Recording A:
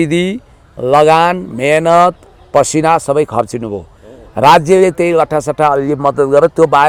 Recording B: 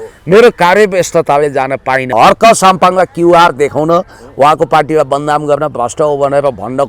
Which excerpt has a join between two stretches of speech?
B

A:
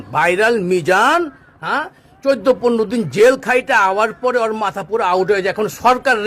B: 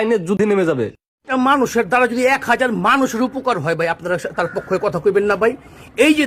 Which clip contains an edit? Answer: B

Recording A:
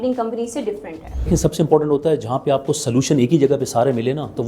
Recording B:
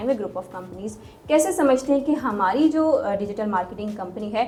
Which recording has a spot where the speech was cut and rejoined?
A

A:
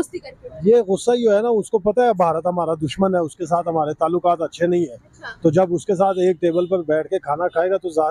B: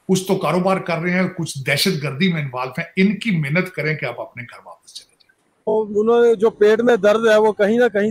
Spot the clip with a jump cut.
B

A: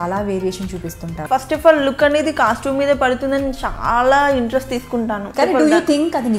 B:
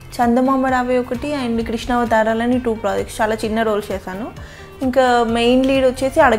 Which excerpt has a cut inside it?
A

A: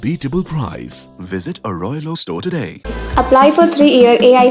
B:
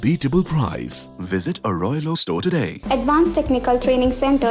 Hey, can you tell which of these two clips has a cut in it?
B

